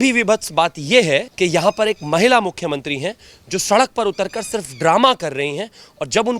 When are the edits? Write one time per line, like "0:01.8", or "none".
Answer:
0:01.3